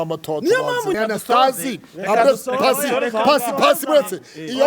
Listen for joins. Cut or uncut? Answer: cut